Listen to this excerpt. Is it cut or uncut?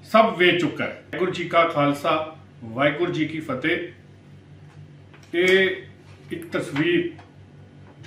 cut